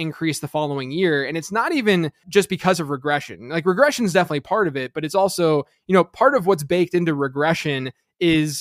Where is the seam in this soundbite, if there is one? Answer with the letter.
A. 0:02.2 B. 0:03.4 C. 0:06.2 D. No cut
A